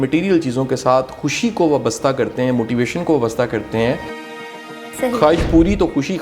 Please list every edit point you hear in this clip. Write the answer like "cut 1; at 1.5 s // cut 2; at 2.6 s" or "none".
cut 1; at 4.4 s